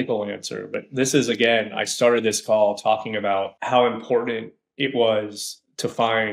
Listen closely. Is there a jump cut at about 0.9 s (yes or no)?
no